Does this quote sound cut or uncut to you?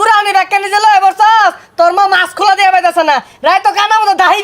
uncut